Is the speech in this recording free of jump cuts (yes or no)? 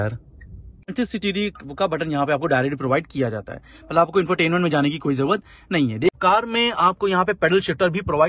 no